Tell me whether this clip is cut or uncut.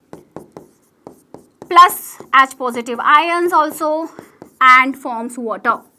uncut